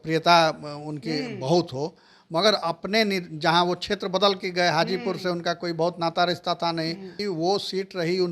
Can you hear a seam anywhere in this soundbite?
yes; 1 cut; at 7.1 s

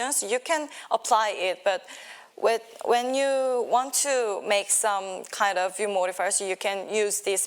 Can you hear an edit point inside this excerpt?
no; 0 cuts

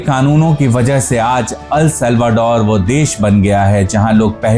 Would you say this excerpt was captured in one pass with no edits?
yes; 0 cuts

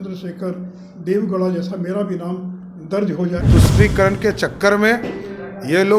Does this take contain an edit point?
yes; 1 cut; at 3.5 s

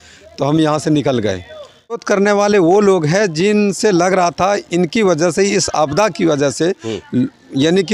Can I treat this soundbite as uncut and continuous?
no; 1 cut; at 2.0 s

